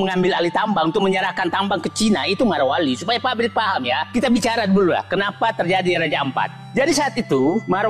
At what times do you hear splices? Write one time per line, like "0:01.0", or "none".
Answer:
none